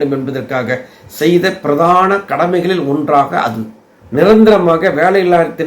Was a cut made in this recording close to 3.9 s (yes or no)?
yes